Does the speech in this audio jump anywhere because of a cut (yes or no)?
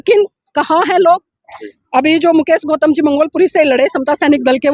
no